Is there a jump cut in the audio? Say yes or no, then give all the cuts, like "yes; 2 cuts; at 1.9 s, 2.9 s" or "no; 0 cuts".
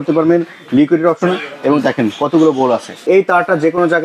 yes; 1 cut; at 3.0 s